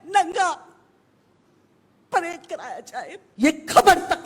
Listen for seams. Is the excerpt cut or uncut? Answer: cut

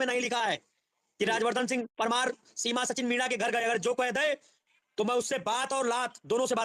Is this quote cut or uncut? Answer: uncut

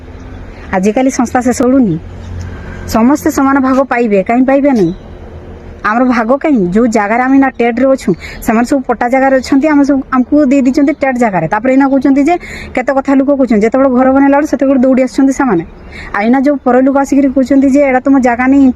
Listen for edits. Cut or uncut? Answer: cut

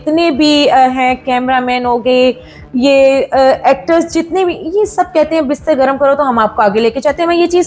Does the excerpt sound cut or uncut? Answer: uncut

